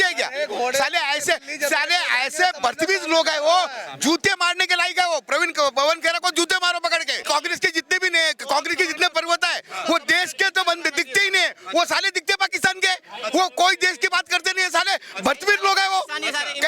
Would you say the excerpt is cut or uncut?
cut